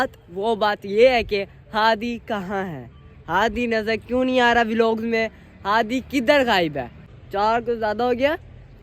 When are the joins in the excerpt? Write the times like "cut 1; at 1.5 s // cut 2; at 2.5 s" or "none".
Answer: cut 1; at 7.1 s